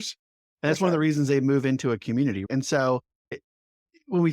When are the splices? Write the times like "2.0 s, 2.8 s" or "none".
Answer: 2.5 s, 3.4 s